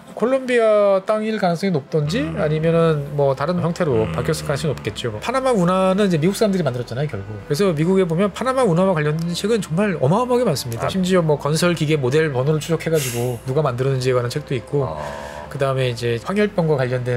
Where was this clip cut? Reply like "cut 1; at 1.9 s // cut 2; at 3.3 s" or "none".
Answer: cut 1; at 5.2 s // cut 2; at 7.3 s // cut 3; at 10.9 s // cut 4; at 16.2 s